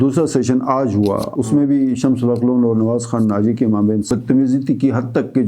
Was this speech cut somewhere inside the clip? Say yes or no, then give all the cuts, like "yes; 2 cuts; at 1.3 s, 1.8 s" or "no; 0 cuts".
yes; 2 cuts; at 1.3 s, 4.1 s